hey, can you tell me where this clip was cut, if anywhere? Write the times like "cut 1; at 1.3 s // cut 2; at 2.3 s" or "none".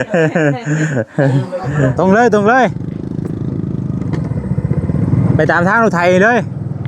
cut 1; at 1.9 s